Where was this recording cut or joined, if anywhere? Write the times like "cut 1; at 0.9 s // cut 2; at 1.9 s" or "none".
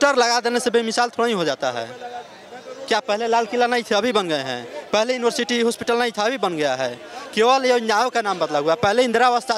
none